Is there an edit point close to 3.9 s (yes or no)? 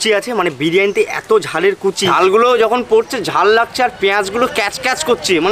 no